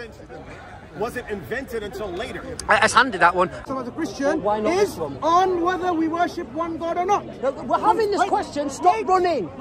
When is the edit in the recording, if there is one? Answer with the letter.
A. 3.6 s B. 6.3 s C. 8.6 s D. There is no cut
A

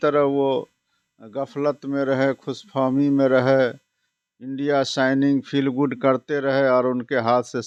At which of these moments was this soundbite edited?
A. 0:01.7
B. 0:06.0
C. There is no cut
C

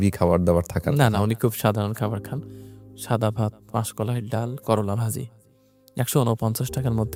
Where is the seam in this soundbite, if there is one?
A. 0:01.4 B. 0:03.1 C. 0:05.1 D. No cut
D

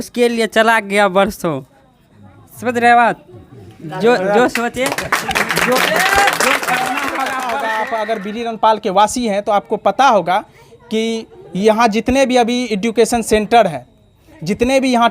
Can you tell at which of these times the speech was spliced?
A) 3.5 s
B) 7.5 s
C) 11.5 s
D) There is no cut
B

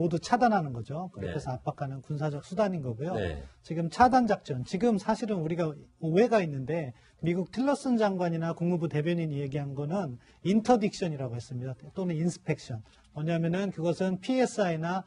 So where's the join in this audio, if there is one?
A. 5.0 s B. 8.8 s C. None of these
C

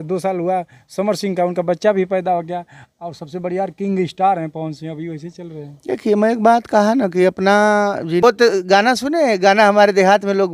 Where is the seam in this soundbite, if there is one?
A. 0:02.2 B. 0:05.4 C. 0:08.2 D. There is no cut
C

